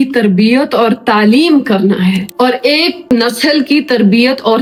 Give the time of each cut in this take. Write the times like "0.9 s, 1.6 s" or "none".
none